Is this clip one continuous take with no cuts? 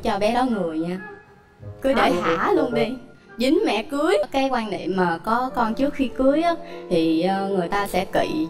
no; 1 cut; at 4.3 s

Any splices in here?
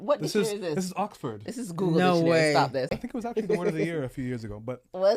yes; 1 cut; at 2.9 s

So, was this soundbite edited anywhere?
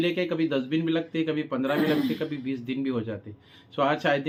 no; 0 cuts

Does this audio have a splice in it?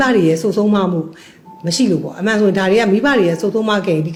no; 0 cuts

